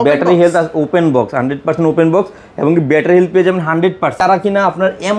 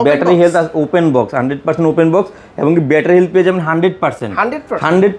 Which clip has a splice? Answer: first; 1 cut; at 4.2 s

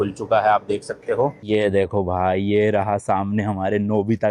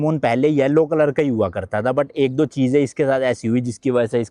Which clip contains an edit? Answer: first; 1 cut; at 1.4 s

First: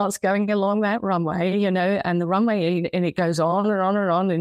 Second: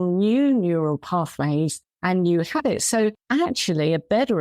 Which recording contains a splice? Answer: second; 2 cuts; at 1.9 s, 3.2 s

